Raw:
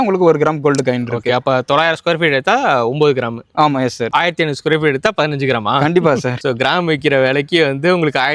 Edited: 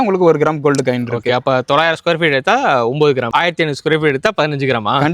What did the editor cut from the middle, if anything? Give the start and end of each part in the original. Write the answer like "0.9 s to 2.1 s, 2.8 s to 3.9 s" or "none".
3.3 s to 4.1 s